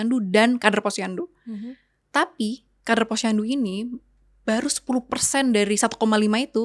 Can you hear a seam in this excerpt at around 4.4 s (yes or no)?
no